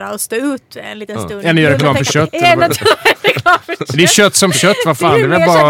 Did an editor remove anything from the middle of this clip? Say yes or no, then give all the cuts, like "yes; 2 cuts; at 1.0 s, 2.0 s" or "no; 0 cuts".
no; 0 cuts